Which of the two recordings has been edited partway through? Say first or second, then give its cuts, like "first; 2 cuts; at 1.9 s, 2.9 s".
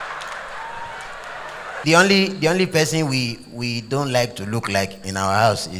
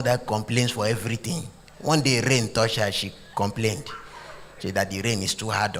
first; 1 cut; at 1.8 s